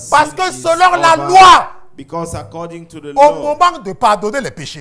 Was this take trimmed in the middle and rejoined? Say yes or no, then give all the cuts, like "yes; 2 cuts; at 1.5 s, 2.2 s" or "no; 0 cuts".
no; 0 cuts